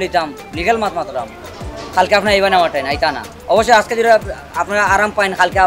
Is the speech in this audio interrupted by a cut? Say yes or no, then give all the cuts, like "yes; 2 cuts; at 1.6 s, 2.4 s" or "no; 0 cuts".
no; 0 cuts